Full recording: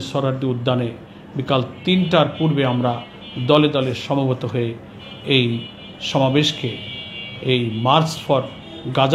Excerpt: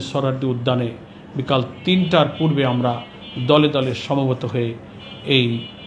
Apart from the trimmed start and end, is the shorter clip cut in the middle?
no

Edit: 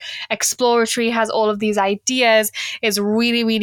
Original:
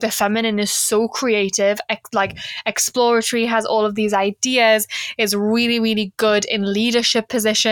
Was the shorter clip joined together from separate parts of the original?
no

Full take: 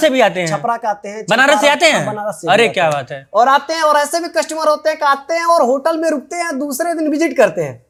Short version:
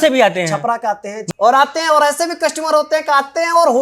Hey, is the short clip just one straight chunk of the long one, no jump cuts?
no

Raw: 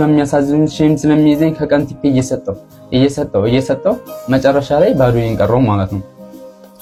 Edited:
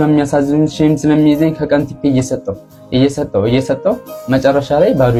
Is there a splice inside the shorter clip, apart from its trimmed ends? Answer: no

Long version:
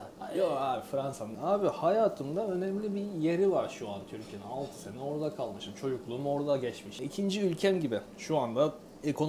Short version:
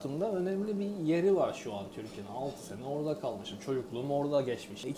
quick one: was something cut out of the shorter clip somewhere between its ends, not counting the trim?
no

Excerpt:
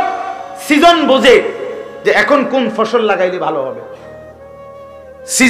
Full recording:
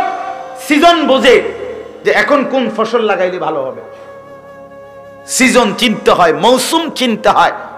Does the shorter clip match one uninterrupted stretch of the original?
yes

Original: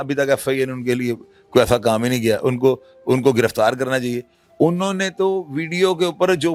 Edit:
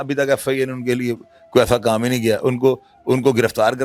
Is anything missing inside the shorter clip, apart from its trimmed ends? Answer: no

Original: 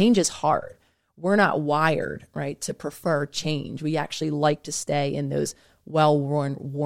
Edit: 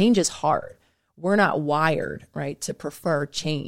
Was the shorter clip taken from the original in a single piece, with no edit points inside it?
yes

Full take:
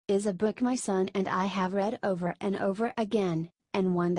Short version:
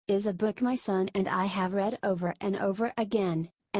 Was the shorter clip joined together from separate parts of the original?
no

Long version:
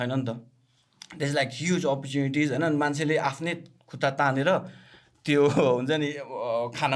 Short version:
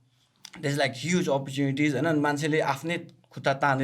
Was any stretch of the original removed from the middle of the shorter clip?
no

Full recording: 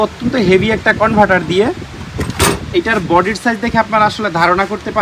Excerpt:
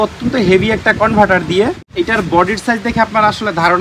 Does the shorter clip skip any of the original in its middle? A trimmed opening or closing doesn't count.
yes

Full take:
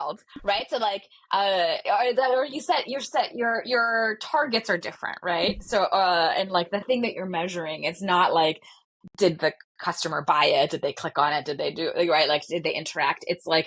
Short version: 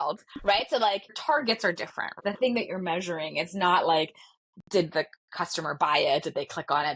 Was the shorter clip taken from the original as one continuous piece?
no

